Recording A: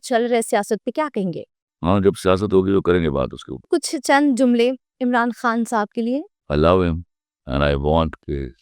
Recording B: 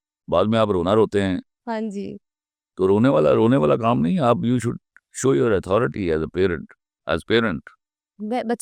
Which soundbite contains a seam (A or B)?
A